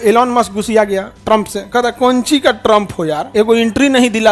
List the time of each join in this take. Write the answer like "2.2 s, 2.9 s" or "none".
3.2 s

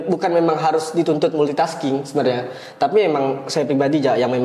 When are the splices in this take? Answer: none

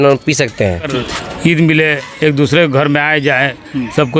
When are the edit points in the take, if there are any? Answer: 1.0 s

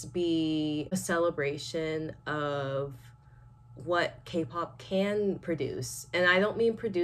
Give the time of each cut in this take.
0.9 s

